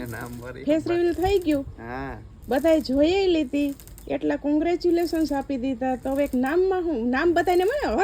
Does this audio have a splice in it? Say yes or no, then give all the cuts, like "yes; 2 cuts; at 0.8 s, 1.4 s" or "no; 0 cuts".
no; 0 cuts